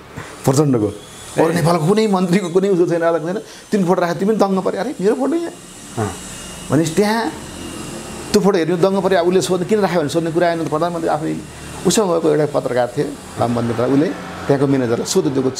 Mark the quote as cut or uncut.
uncut